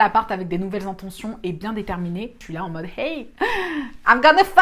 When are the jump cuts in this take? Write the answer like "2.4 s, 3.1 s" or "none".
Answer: 2.4 s